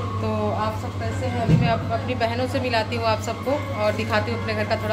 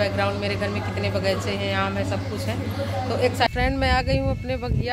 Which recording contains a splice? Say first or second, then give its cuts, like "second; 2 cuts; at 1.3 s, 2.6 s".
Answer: second; 1 cut; at 3.5 s